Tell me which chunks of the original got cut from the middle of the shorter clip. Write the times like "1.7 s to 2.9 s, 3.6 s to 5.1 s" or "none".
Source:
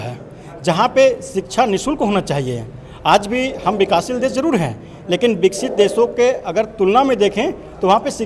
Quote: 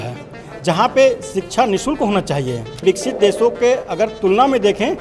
2.8 s to 5.4 s